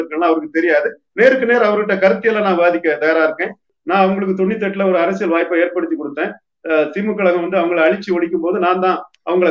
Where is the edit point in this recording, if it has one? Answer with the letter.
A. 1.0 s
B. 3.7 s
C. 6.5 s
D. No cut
B